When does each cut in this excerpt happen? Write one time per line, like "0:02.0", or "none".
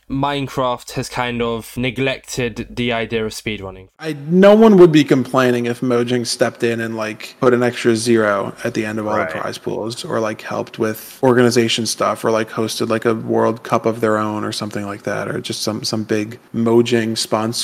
0:04.2